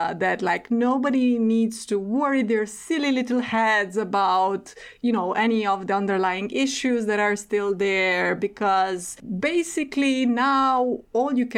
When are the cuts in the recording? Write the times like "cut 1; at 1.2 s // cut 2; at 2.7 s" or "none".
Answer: none